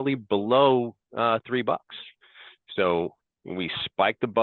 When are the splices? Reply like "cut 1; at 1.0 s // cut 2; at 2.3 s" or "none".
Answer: none